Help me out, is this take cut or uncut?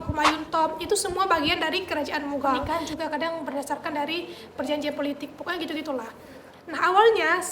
cut